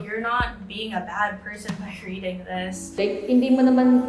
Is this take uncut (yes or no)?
no